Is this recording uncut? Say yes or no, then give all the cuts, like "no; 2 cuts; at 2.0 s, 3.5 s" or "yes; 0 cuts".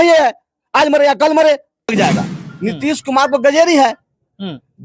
no; 1 cut; at 1.9 s